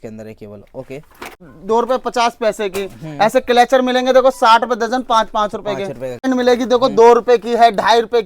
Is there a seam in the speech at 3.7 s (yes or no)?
no